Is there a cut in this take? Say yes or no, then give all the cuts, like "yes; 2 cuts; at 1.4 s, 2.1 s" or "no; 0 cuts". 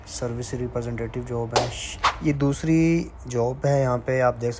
yes; 1 cut; at 1.6 s